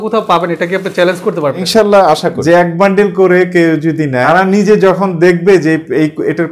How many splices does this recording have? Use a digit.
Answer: 3